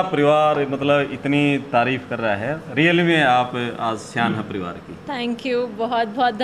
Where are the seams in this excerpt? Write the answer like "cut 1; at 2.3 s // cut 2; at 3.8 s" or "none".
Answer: none